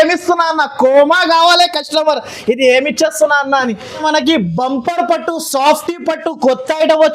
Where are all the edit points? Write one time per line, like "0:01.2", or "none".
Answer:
0:03.8